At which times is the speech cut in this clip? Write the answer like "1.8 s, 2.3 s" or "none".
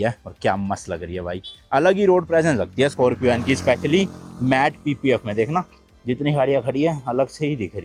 none